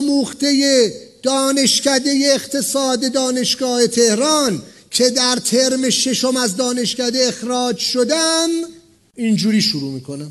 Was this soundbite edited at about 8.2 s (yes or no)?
no